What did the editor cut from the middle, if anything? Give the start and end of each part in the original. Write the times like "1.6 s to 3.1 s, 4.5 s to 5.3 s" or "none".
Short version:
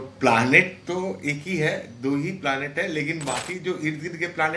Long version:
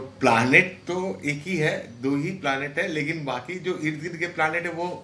none

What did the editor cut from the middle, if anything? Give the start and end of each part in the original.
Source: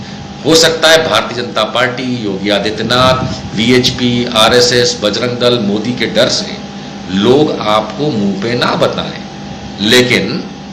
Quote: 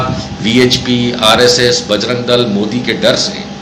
none

